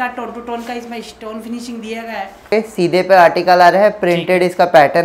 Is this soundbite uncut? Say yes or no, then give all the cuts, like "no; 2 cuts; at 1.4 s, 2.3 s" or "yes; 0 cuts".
no; 1 cut; at 2.5 s